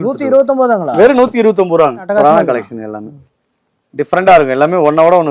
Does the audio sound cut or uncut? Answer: cut